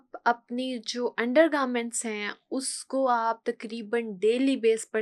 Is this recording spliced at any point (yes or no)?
no